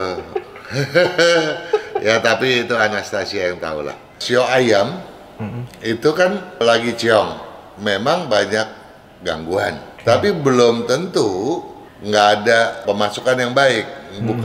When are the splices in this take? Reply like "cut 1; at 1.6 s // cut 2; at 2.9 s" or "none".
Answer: cut 1; at 4.2 s // cut 2; at 6.6 s // cut 3; at 9.9 s // cut 4; at 12.8 s